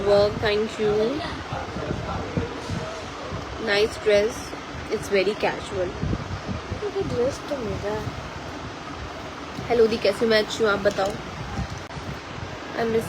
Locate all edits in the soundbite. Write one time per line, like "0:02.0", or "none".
0:11.9